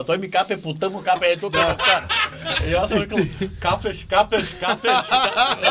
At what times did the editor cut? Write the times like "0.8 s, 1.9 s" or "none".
none

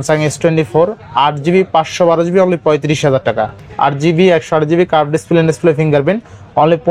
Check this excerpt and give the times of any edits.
3.6 s

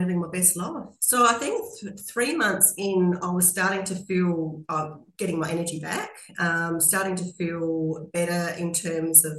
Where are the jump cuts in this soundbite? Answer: 0.9 s

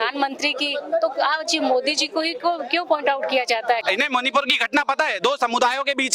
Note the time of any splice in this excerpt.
3.8 s

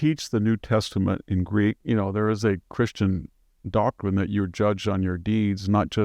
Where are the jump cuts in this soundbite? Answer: 1.8 s

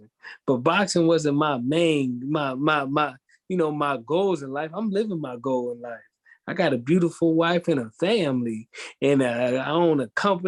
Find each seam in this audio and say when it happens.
none

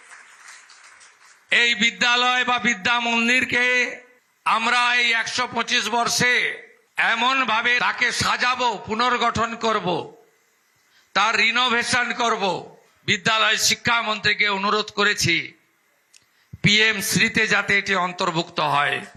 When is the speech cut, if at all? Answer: none

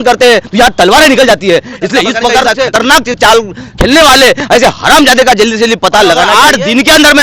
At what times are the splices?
2.5 s, 6.3 s

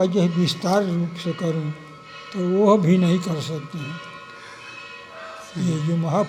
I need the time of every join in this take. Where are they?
none

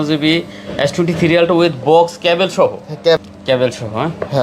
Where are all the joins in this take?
3.2 s

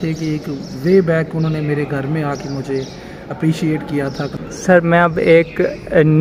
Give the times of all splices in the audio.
4.4 s

